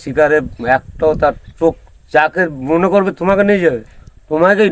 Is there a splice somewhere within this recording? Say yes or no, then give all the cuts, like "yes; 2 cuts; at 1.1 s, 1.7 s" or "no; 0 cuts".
no; 0 cuts